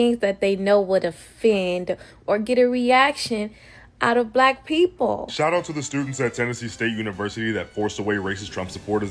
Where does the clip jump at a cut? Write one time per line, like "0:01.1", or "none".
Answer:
0:05.3